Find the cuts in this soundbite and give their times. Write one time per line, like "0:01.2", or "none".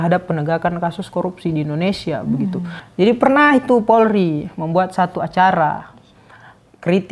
0:02.8